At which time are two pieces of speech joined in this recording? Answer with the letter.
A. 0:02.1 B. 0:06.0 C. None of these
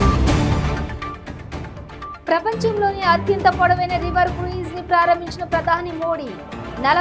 A